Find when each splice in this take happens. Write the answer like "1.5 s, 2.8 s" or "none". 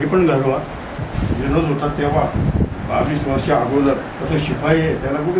0.9 s, 2.8 s, 4.1 s